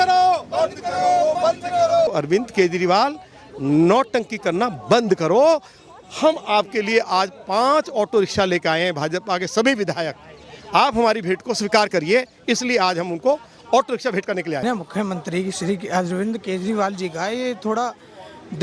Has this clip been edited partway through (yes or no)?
yes